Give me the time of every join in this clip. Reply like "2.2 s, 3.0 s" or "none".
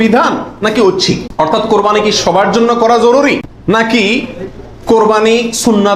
1.3 s, 3.5 s